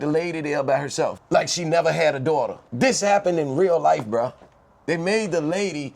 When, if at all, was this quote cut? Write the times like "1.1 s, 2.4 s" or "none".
1.2 s, 2.6 s